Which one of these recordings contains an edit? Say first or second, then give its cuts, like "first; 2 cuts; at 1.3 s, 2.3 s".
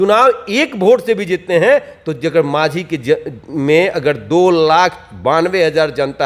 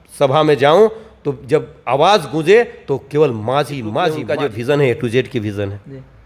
second; 1 cut; at 4.2 s